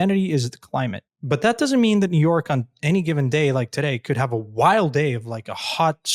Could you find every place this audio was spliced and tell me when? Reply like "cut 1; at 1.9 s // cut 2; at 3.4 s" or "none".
cut 1; at 1.1 s